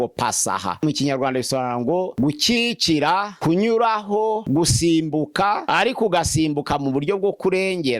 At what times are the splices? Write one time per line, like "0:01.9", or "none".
0:00.8
0:02.1
0:03.3
0:04.4
0:05.6